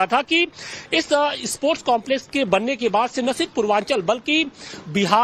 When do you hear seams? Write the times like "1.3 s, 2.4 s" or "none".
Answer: 1.4 s